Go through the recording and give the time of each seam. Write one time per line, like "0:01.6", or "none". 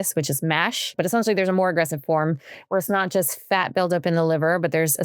0:00.9